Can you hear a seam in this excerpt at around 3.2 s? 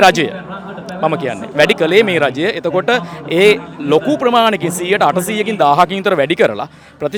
no; 0 cuts

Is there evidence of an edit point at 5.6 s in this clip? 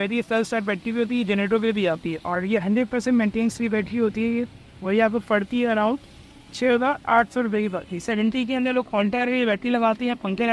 no; 2 cuts; at 2.3 s, 8.0 s

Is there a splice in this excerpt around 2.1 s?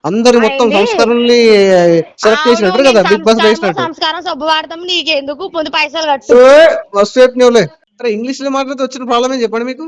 no; 1 cut; at 7.8 s

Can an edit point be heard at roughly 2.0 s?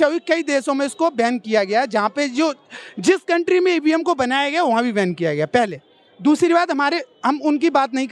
no; 0 cuts

